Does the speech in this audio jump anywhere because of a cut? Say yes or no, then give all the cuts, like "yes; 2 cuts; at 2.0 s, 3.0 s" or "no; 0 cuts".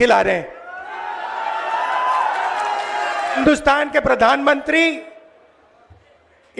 yes; 1 cut; at 3.4 s